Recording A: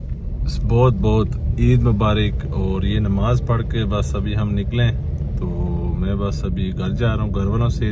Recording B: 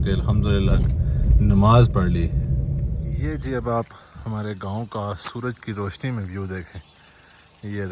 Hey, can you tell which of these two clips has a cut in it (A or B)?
B